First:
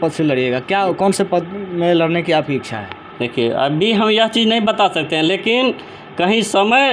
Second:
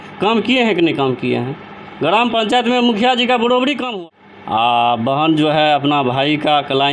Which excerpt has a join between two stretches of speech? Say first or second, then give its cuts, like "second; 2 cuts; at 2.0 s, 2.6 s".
second; 1 cut; at 3.8 s